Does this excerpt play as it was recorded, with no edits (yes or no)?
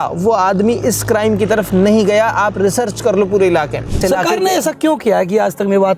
no